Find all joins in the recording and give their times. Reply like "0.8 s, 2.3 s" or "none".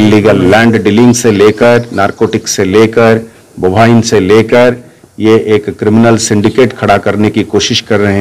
none